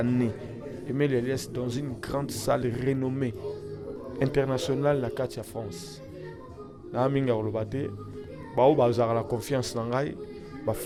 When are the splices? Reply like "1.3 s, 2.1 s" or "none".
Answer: none